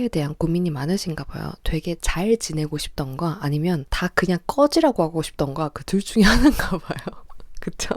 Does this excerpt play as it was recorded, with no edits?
no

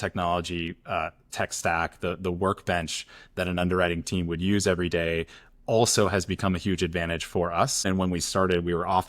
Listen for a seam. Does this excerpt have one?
yes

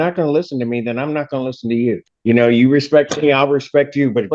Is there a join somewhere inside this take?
yes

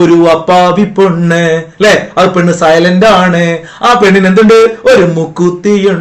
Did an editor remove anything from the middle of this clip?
no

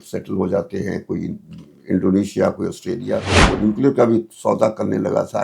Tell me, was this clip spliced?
yes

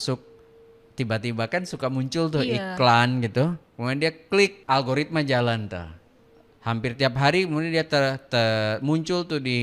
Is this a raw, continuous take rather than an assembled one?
no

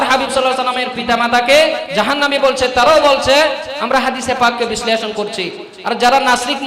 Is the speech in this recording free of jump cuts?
no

